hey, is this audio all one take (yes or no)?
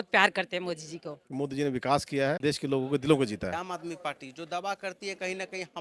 no